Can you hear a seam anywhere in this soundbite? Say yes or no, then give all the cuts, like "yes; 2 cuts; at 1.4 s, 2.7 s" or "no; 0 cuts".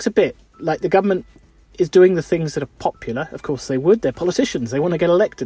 no; 0 cuts